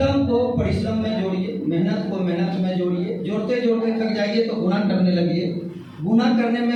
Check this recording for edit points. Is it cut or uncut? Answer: uncut